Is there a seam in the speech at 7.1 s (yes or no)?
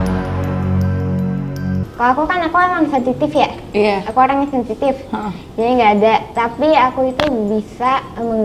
no